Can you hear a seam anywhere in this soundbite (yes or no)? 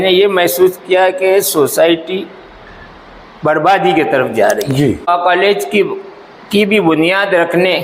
yes